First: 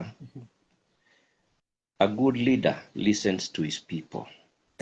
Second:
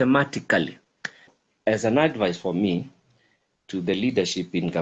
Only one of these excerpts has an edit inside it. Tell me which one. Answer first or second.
second